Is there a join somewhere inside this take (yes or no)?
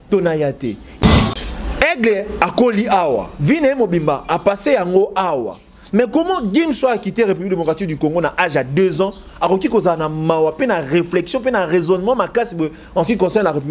yes